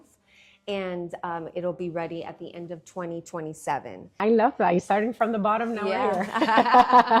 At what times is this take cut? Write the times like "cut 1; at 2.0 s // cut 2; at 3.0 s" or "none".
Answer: cut 1; at 4.1 s

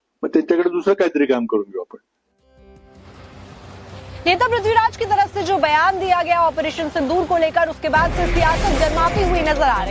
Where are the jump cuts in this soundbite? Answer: cut 1; at 4.8 s

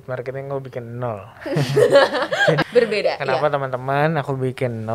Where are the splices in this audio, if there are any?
cut 1; at 2.6 s

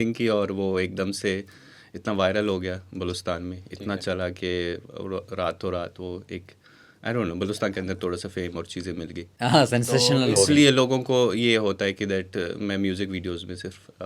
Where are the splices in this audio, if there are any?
none

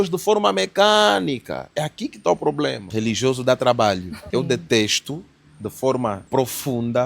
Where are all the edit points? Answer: cut 1; at 2.8 s // cut 2; at 4.2 s // cut 3; at 6.2 s

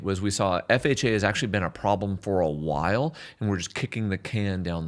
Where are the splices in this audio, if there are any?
none

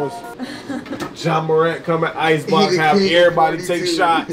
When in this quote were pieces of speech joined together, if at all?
cut 1; at 1.0 s

